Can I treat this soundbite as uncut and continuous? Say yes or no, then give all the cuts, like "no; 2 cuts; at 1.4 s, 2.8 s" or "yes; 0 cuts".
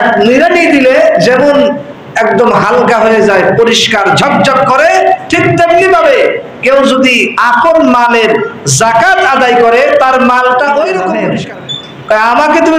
no; 1 cut; at 11.2 s